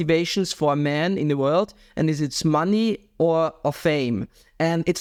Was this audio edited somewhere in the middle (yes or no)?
no